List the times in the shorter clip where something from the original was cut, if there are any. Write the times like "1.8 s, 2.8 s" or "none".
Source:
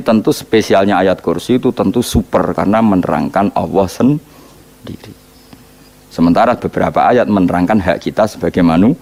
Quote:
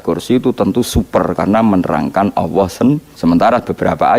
3.1 s

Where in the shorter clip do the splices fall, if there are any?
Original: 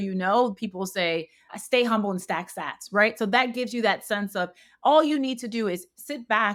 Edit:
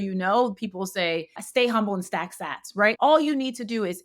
1.4 s, 3.0 s

